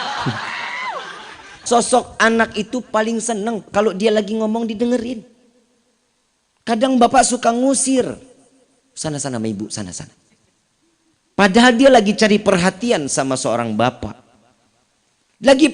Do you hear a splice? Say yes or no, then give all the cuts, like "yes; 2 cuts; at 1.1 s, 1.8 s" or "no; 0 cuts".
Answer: yes; 1 cut; at 1.6 s